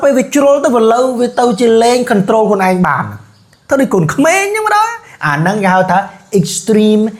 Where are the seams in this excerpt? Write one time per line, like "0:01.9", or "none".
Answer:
none